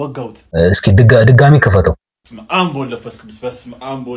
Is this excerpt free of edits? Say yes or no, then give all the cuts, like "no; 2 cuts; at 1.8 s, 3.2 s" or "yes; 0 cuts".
yes; 0 cuts